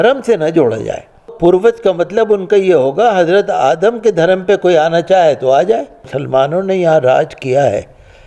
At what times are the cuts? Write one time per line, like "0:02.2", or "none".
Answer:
0:01.3
0:06.1